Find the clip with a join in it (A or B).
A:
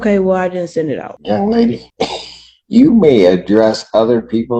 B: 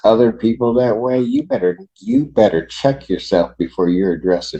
A